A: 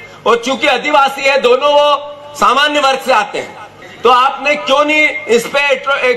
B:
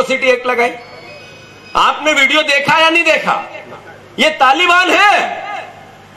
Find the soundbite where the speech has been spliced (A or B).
A